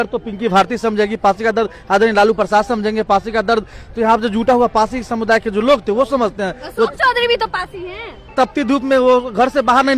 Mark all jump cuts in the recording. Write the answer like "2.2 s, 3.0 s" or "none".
8.2 s